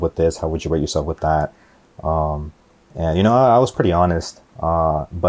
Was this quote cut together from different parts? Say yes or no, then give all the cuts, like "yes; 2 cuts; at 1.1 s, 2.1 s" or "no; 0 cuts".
no; 0 cuts